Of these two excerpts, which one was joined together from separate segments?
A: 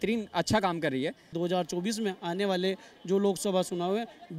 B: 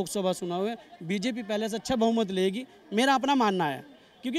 A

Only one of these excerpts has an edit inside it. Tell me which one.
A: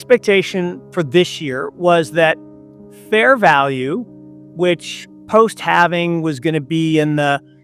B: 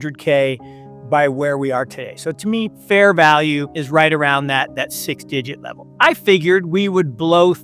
B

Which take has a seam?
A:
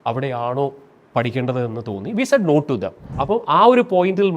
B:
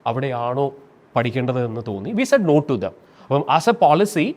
A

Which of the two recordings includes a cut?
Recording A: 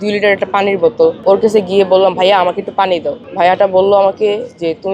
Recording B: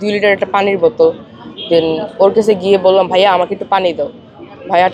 A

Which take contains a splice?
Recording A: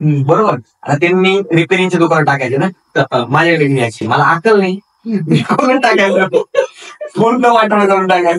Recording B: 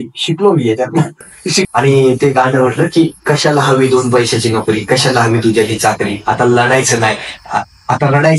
B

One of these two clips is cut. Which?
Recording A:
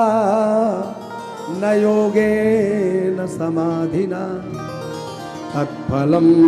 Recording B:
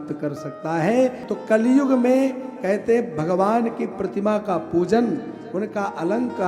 B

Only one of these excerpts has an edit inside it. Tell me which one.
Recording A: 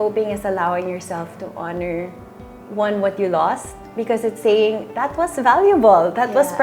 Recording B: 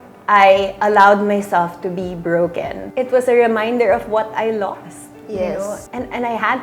B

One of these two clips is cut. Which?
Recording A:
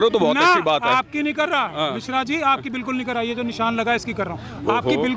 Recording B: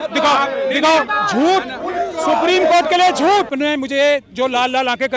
B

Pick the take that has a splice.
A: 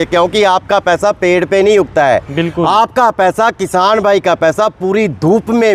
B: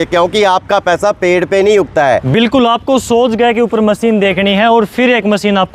B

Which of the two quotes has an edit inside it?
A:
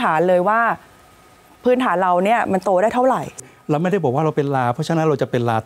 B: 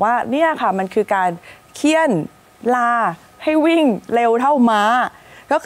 A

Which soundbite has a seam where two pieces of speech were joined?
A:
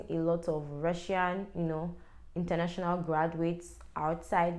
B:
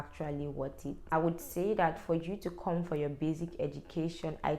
B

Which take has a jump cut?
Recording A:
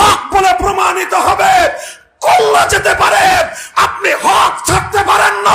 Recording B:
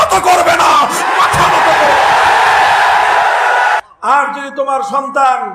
B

